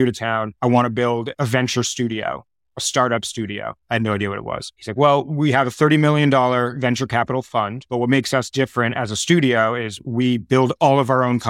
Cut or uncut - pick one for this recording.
uncut